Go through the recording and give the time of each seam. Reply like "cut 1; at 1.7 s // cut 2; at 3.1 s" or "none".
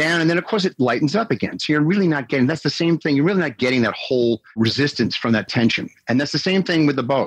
none